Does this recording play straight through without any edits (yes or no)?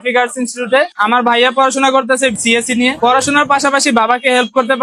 no